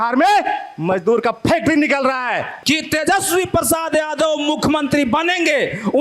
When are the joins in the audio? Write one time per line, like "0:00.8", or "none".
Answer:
0:02.5